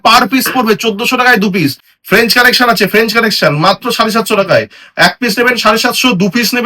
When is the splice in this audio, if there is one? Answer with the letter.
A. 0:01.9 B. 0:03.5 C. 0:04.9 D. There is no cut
A